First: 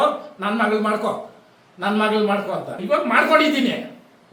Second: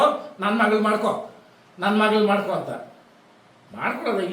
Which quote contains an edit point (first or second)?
first